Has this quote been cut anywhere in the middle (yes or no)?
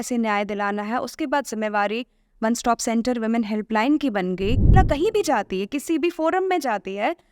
yes